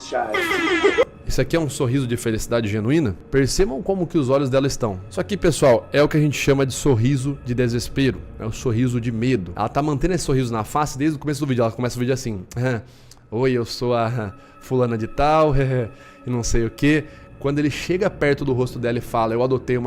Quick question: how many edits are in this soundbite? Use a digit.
2